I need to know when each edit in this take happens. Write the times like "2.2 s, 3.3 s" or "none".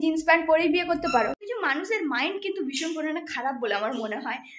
none